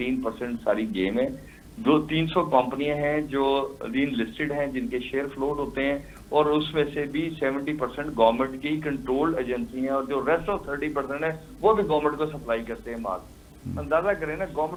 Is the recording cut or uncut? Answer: uncut